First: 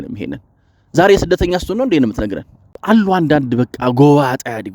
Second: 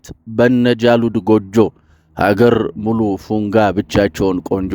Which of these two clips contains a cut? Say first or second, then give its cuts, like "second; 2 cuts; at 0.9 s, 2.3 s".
first; 1 cut; at 2.8 s